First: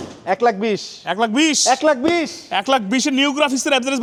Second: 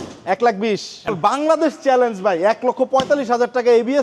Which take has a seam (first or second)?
second